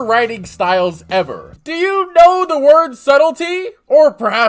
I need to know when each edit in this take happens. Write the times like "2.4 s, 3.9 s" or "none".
1.5 s

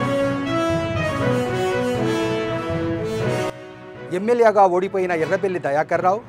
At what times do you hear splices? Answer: 3.5 s

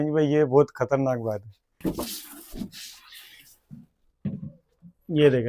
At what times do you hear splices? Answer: 1.8 s

